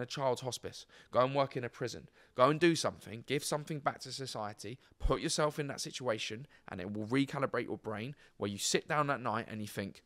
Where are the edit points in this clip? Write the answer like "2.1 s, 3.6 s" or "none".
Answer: none